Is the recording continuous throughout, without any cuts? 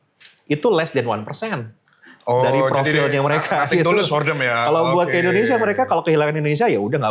yes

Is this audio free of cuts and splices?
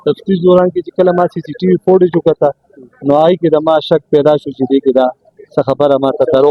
yes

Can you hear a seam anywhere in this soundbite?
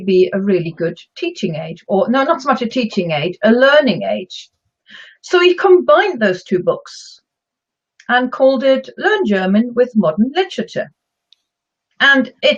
no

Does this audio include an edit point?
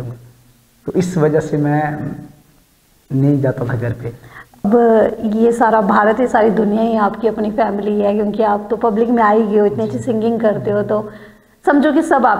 yes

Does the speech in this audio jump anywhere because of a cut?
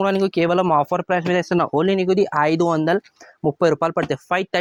no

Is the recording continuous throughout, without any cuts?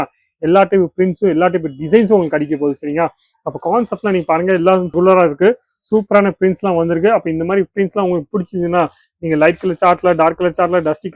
yes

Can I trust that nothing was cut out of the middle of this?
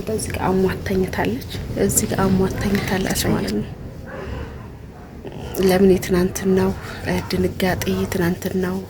no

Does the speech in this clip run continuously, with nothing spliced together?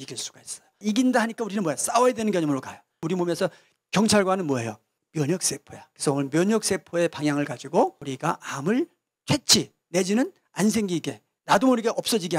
no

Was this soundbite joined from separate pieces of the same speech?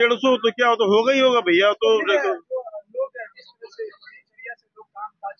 no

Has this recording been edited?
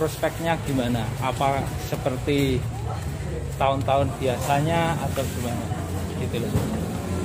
no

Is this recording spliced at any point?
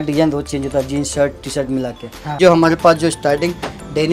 yes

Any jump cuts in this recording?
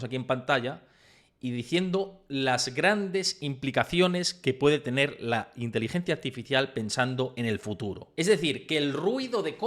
yes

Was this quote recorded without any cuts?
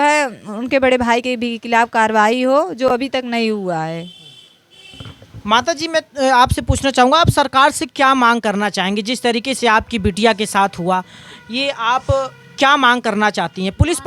yes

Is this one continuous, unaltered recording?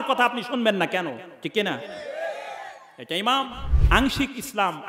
no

